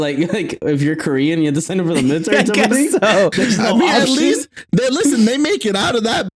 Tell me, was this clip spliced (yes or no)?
no